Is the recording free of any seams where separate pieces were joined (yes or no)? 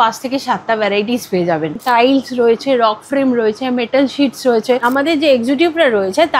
no